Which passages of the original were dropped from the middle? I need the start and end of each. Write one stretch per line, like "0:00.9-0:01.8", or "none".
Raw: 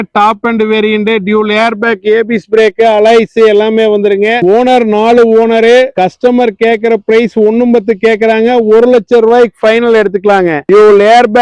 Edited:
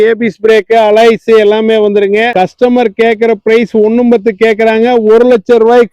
0:04.4-0:05.9